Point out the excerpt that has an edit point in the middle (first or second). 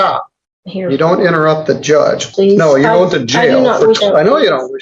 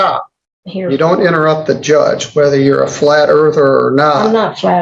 first